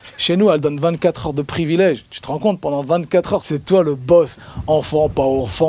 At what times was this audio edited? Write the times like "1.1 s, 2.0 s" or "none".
3.5 s, 4.5 s